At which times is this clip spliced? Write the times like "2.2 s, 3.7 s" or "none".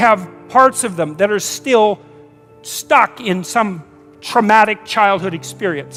none